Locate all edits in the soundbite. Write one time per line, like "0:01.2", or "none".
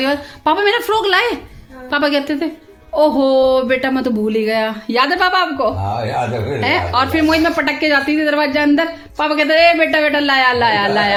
none